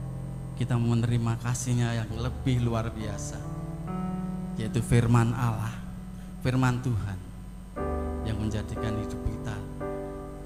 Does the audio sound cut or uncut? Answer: uncut